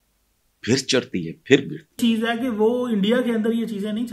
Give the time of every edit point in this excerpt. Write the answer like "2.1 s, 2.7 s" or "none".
1.8 s